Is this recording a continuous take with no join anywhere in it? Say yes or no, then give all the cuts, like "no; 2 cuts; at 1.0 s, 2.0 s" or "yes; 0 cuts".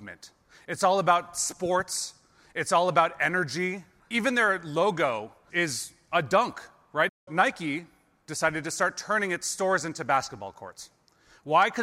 no; 1 cut; at 7.3 s